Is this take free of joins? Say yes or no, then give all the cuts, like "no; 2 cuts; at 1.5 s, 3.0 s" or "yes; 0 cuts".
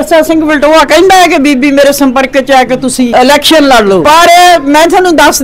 no; 2 cuts; at 3.1 s, 4.0 s